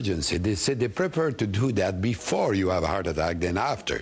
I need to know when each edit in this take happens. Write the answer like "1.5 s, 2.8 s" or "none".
2.8 s